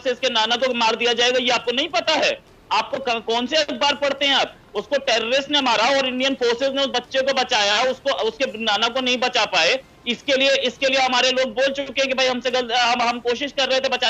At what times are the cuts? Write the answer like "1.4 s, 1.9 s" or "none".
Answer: none